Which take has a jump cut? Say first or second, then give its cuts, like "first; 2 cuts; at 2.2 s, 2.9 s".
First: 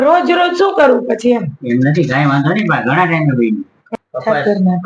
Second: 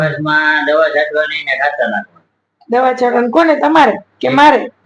first; 1 cut; at 3.8 s